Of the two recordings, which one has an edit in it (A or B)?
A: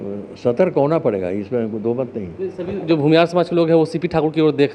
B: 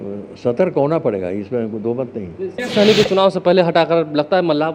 B